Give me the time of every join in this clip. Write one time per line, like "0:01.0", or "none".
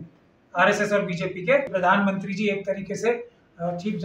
0:01.7